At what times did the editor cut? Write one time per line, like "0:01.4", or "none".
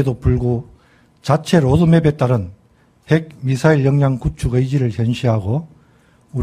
0:05.0